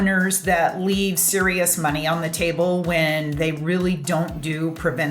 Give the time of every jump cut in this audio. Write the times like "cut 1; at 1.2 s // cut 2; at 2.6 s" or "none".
none